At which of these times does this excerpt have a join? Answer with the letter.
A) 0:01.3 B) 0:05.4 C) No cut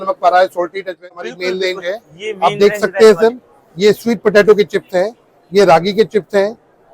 A